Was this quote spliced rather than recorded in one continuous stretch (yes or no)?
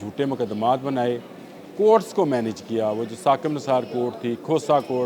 no